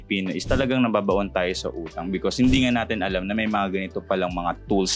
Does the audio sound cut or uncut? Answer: uncut